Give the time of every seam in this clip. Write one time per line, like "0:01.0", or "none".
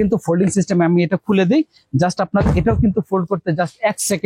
none